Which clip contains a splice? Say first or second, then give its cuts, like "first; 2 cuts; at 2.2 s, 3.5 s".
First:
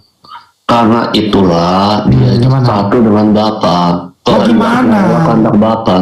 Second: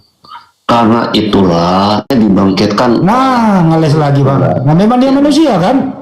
second; 1 cut; at 2.1 s